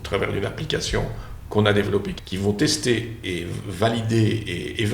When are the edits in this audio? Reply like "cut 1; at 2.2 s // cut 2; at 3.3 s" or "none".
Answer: cut 1; at 2.2 s // cut 2; at 3.2 s